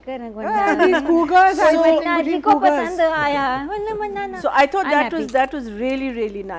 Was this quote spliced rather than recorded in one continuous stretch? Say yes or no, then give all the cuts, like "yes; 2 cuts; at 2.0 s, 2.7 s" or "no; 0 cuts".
no; 0 cuts